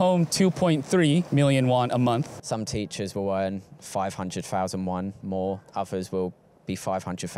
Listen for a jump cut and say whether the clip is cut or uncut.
cut